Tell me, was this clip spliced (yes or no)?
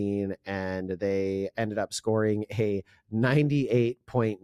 no